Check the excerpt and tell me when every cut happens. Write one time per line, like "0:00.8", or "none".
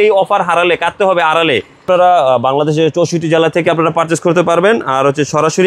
0:01.9